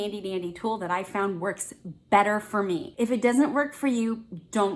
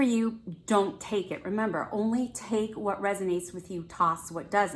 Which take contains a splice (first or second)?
first